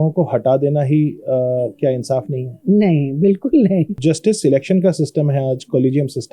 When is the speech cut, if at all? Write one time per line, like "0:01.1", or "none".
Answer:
0:04.0